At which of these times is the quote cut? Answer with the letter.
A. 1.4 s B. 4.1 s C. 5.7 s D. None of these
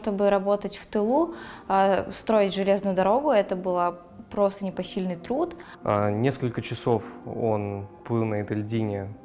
C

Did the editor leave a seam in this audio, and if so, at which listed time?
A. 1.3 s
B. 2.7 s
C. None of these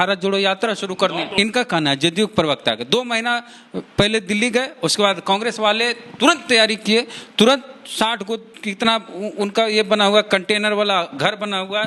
A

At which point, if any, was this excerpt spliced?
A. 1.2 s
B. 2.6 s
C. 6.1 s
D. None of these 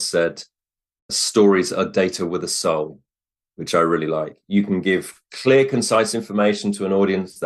A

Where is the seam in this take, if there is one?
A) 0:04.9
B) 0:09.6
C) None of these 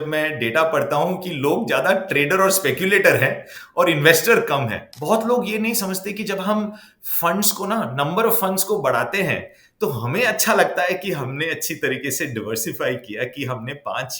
A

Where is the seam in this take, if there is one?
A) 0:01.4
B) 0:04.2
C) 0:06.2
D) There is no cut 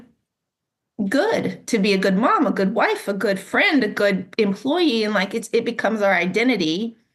D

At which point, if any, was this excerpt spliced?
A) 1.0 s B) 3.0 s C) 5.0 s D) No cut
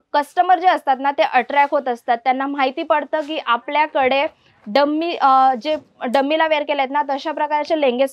D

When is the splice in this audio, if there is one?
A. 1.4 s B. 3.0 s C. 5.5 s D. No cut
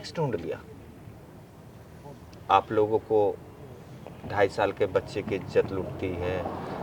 D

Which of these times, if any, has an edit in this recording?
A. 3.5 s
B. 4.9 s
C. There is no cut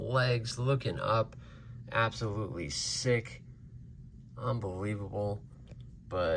C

